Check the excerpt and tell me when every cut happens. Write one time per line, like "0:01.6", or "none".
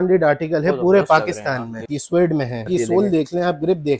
0:01.8
0:02.7